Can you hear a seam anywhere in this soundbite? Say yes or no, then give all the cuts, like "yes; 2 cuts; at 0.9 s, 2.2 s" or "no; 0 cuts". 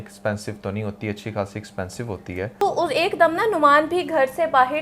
yes; 1 cut; at 2.6 s